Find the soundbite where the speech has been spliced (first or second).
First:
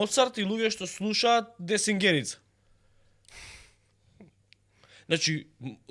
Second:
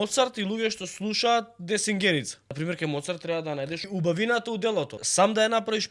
second